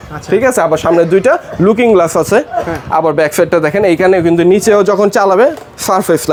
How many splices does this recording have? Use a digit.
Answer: 0